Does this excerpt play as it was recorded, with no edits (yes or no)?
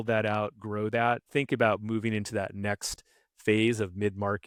yes